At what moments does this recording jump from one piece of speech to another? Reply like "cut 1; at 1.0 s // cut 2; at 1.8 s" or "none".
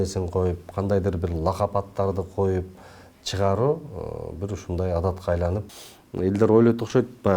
cut 1; at 5.6 s